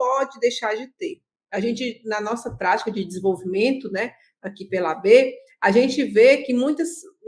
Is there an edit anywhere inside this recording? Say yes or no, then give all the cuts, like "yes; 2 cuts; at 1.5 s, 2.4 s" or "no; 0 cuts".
no; 0 cuts